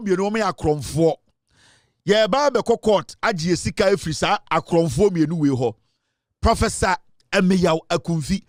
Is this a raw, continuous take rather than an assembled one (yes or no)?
yes